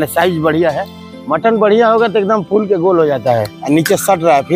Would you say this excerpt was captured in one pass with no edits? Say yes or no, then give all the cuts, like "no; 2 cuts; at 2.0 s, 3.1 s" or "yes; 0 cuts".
no; 1 cut; at 3.5 s